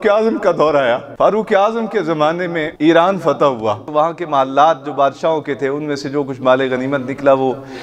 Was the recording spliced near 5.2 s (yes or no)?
no